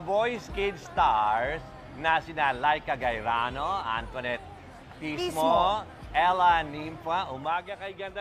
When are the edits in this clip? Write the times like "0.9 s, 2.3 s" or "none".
none